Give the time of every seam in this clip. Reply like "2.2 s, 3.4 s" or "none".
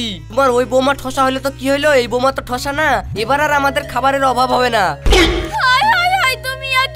none